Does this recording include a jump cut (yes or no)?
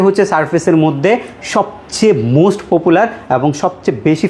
no